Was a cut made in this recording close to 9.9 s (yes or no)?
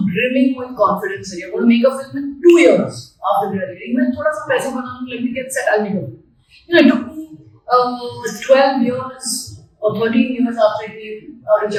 no